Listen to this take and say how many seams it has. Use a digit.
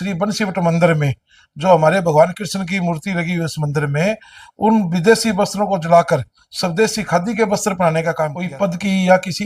1